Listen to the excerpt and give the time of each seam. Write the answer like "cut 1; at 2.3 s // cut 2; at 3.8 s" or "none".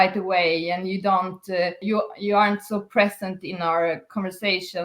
cut 1; at 1.8 s